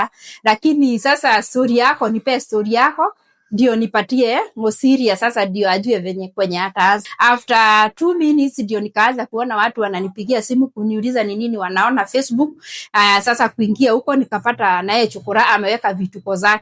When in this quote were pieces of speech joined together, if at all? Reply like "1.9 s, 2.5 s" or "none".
7.1 s